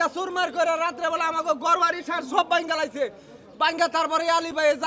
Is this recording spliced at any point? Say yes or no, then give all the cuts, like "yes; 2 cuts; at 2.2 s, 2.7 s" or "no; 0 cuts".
no; 0 cuts